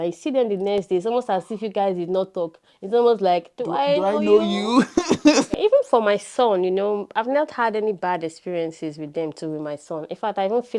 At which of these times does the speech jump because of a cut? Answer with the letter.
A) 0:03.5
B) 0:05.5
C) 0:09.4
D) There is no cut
B